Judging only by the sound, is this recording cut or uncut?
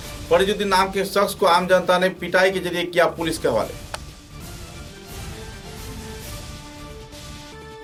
uncut